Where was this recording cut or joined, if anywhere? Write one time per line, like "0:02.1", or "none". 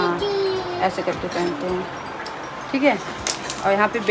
none